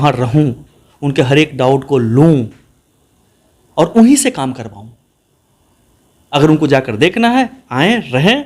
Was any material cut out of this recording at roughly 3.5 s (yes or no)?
no